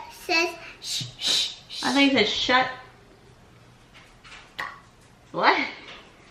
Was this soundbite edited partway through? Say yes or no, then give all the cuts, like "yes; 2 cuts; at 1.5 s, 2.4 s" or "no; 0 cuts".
no; 0 cuts